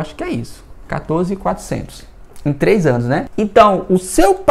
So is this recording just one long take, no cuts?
yes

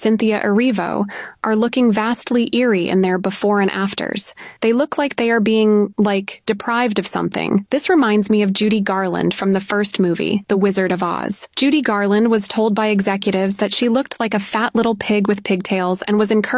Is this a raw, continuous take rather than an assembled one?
yes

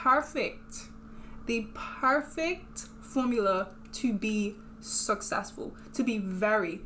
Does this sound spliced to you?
no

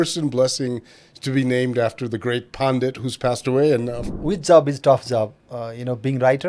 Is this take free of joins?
no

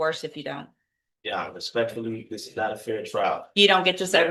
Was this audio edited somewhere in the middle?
no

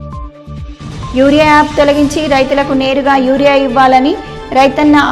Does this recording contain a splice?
yes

